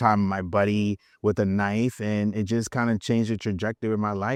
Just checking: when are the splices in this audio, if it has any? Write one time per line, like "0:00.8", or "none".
none